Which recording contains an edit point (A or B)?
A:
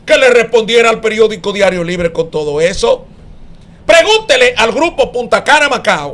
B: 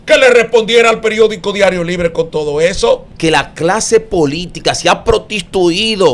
B